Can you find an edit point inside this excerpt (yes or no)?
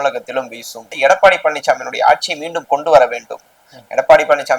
yes